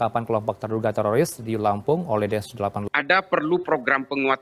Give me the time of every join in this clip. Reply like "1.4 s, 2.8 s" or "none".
2.8 s